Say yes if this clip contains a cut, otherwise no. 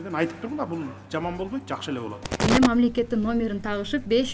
yes